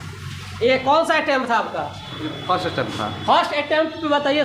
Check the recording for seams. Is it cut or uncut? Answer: uncut